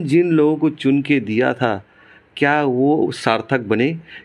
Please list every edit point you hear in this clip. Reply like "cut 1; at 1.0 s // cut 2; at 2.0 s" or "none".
none